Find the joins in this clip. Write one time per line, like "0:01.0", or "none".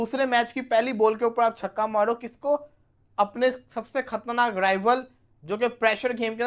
none